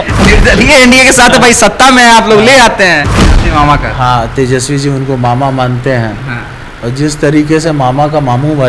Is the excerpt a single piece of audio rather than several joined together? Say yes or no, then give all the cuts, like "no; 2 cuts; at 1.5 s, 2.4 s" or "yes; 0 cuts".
no; 1 cut; at 3.1 s